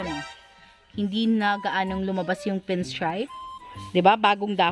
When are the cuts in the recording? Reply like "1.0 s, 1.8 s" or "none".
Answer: 3.2 s